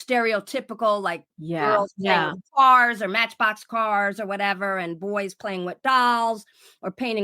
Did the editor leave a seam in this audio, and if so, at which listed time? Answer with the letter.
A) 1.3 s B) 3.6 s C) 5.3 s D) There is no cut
A